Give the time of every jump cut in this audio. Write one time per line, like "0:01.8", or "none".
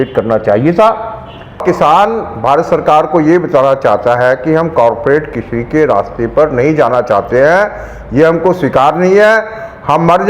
0:01.6